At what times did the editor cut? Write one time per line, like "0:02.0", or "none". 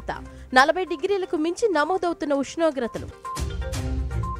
none